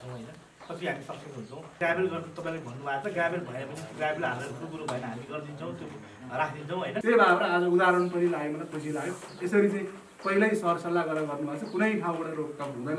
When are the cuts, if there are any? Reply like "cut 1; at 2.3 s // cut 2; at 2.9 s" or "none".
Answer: cut 1; at 1.8 s // cut 2; at 7.0 s